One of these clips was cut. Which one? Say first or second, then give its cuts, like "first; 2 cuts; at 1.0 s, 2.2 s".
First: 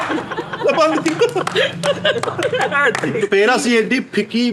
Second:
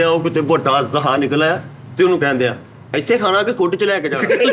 first; 1 cut; at 3.2 s